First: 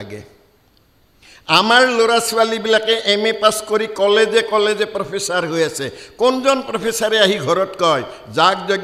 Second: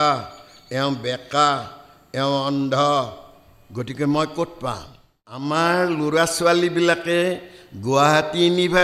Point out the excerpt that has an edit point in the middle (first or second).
second